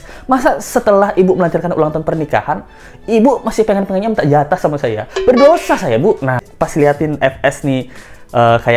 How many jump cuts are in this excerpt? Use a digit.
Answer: 1